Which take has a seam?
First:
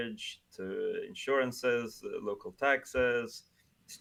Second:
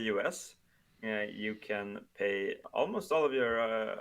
second; 1 cut; at 2.6 s

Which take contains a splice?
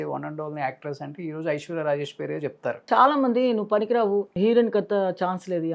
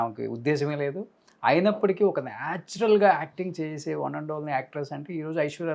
first; 2 cuts; at 2.8 s, 4.3 s

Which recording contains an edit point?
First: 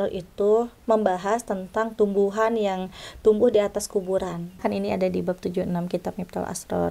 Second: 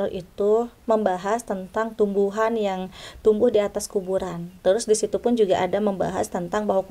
first; 1 cut; at 4.6 s

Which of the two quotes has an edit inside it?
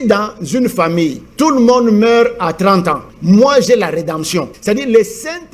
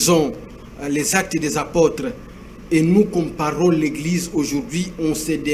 first; 3 cuts; at 1.2 s, 3.1 s, 4.5 s

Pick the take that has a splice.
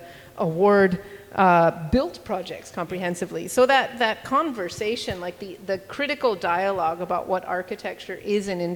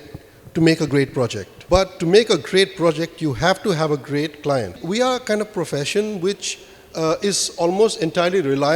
second; 2 cuts; at 1.5 s, 4.7 s

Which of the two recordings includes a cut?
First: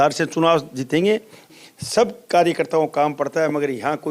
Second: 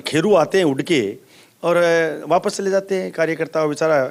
first; 1 cut; at 1.4 s

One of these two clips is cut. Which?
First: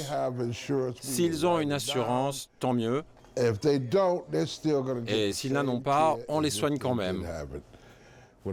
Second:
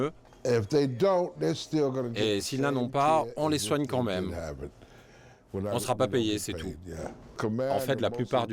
second; 1 cut; at 7.4 s

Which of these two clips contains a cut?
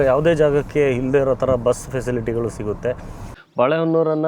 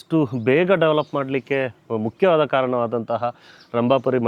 first; 1 cut; at 3.2 s

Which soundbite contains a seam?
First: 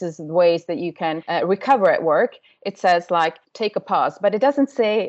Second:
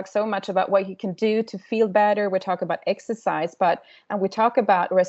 first; 2 cuts; at 1.2 s, 3.4 s

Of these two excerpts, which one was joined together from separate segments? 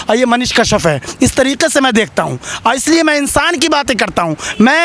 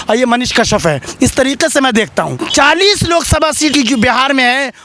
second; 2 cuts; at 2.4 s, 3.7 s

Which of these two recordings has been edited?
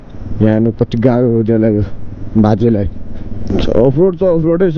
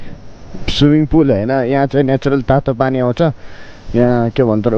first; 1 cut; at 3.3 s

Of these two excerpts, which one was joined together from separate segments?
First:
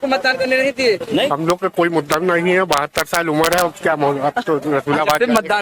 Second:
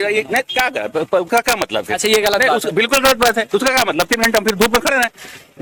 first; 1 cut; at 1.3 s

